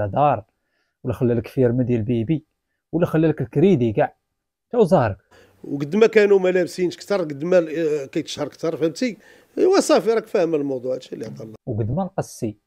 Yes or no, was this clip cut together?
yes